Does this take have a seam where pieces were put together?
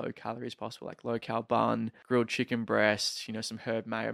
yes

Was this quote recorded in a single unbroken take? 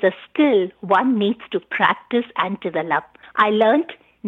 no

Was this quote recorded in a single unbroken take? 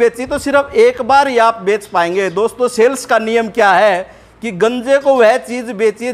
yes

